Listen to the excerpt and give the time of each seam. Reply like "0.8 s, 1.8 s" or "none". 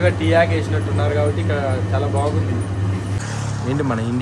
3.2 s